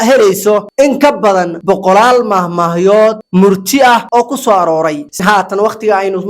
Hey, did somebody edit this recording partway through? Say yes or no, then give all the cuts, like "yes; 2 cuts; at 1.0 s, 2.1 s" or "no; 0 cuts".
yes; 1 cut; at 5.2 s